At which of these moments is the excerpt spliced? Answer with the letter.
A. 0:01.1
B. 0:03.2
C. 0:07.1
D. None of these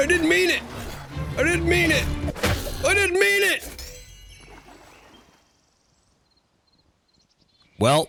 D